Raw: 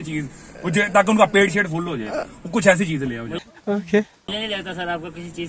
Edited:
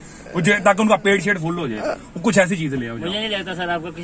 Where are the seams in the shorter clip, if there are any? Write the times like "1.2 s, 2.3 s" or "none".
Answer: 3.1 s